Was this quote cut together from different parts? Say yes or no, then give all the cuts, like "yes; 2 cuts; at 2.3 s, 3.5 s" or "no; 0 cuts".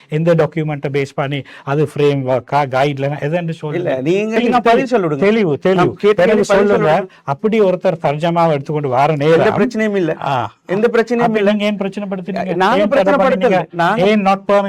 yes; 1 cut; at 4.4 s